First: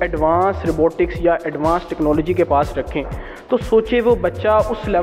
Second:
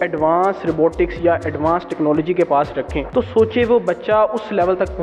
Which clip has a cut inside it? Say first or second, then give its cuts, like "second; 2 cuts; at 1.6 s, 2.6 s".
second; 1 cut; at 3.0 s